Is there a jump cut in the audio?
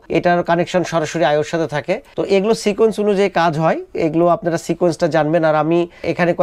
no; 0 cuts

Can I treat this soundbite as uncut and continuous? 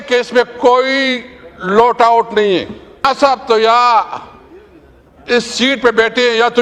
no; 1 cut; at 3.0 s

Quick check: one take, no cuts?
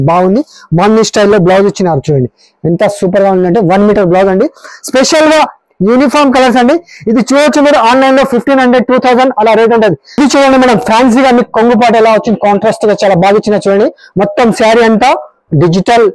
no; 1 cut; at 10.3 s

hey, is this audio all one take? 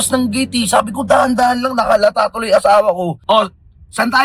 no; 1 cut; at 3.2 s

